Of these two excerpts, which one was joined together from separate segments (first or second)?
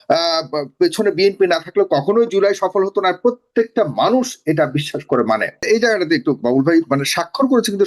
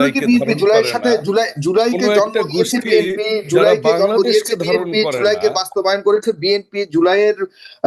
first